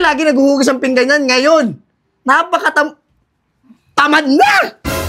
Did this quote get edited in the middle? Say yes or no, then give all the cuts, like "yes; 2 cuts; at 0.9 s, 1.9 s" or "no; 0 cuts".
no; 0 cuts